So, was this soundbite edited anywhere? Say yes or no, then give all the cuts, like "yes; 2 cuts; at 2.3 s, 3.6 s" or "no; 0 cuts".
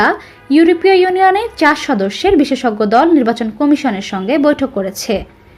no; 0 cuts